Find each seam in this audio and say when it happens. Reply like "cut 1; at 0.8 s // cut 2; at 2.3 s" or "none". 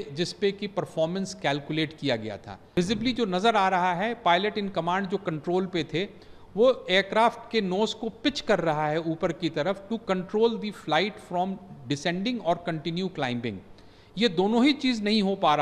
cut 1; at 2.7 s